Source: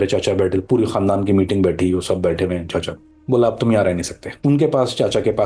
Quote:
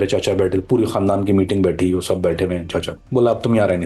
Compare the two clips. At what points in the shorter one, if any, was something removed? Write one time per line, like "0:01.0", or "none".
0:03.0